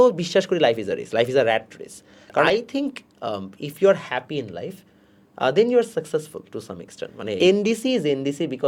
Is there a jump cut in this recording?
yes; 2 cuts; at 2.5 s, 7.4 s

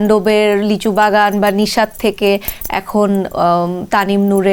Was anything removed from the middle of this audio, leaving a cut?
no; 0 cuts

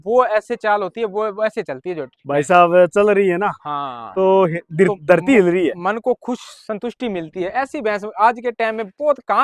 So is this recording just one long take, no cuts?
yes; 0 cuts

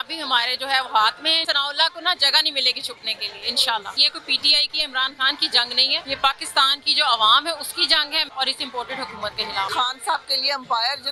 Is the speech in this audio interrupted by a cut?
yes; 5 cuts; at 1.4 s, 4.1 s, 6.0 s, 8.3 s, 9.7 s

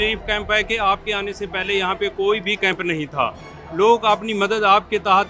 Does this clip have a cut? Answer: no; 0 cuts

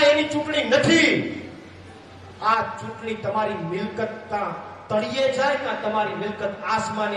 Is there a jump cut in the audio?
no; 0 cuts

